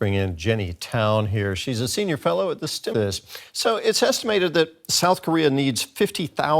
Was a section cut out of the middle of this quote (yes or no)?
yes